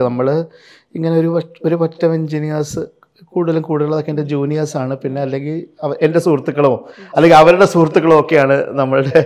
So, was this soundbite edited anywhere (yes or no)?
no